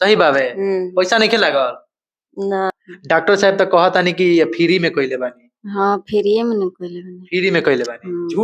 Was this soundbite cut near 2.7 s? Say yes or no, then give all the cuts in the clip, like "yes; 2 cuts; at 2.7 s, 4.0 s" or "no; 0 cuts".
yes; 1 cut; at 2.7 s